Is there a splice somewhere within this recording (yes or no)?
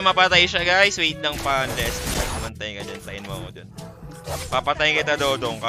no